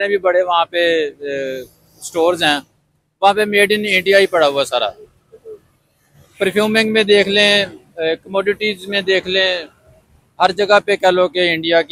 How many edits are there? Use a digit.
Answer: 0